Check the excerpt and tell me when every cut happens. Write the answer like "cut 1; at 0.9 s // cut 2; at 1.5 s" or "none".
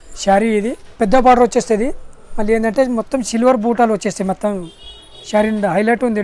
none